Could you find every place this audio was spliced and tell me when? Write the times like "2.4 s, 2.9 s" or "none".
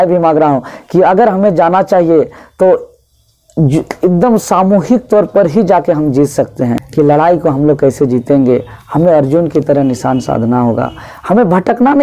6.8 s